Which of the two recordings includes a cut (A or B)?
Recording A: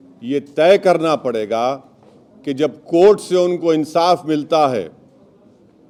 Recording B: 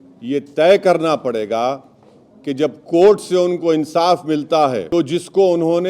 B